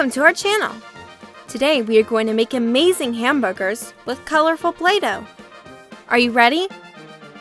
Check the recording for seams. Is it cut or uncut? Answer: uncut